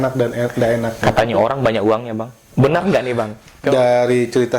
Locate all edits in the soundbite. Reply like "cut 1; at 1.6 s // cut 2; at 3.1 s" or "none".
cut 1; at 3.5 s